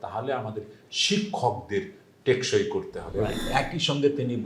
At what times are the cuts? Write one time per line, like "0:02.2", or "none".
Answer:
0:03.4

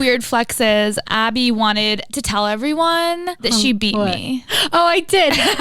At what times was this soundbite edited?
0:01.1
0:02.1
0:03.3

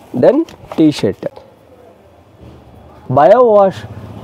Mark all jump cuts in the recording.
0:01.3
0:02.9

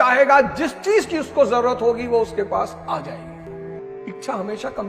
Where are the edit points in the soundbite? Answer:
0:03.5

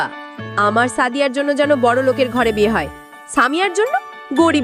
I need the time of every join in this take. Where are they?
none

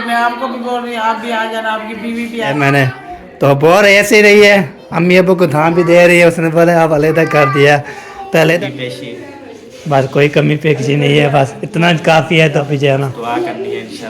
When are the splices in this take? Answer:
0:02.6
0:08.6
0:12.6

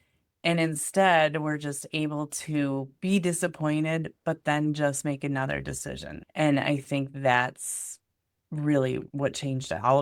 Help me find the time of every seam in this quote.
0:06.2
0:09.1

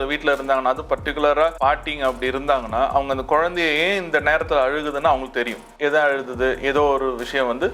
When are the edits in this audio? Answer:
0:01.6
0:05.7

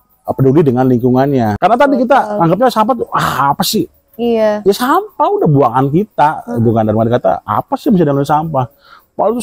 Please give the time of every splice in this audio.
0:01.5

